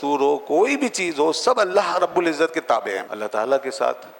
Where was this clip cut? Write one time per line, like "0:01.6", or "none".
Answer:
0:03.1